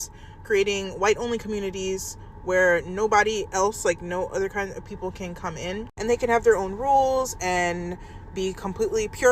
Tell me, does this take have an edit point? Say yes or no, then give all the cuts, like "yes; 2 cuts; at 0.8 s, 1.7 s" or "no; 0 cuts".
no; 0 cuts